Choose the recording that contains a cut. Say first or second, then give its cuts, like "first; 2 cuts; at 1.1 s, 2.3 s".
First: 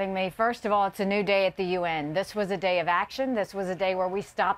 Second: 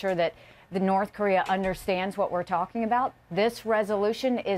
first; 1 cut; at 3.6 s